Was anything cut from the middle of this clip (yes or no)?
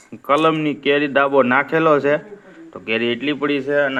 no